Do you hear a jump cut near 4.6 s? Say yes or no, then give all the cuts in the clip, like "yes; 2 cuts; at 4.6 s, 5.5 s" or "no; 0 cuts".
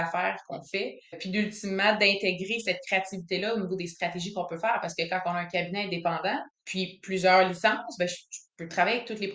no; 2 cuts; at 1.2 s, 6.6 s